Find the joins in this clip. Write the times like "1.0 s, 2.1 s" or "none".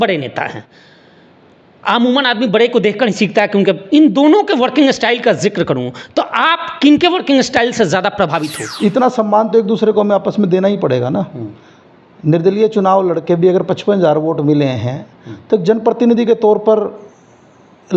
8.6 s